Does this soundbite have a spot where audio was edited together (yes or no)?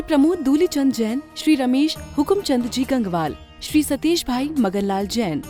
no